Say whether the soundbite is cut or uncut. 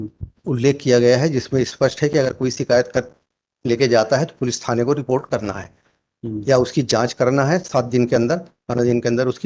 uncut